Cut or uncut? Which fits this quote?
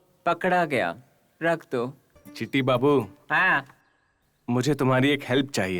cut